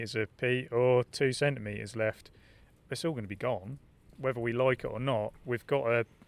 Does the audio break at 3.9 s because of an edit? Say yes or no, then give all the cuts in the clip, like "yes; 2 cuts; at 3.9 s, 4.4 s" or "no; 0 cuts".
no; 1 cut; at 5.4 s